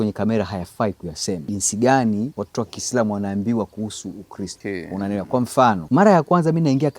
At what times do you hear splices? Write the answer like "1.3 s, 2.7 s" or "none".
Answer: 1.4 s, 2.4 s, 4.6 s, 5.8 s